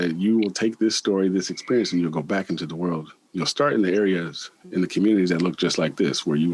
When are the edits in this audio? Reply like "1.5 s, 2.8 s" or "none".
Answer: none